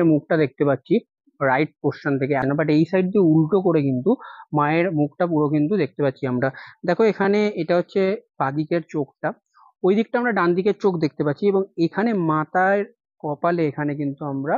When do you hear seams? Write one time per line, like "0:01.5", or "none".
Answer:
0:02.4